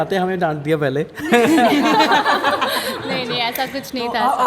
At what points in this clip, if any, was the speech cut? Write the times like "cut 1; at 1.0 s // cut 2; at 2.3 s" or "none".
none